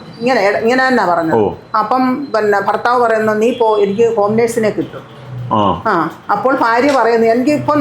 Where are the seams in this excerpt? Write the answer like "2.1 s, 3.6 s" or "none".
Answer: none